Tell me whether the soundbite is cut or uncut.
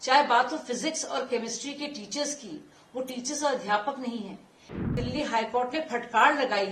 cut